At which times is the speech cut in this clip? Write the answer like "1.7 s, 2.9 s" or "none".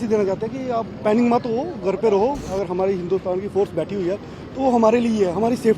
2.4 s